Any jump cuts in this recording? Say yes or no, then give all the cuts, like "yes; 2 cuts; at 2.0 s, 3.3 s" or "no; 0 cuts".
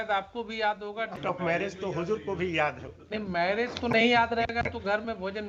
yes; 1 cut; at 1.2 s